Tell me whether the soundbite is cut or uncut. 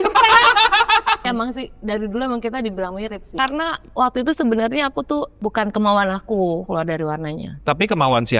cut